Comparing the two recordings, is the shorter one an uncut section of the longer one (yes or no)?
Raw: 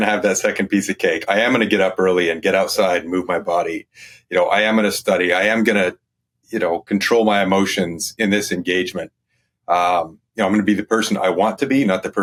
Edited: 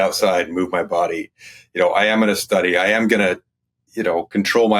yes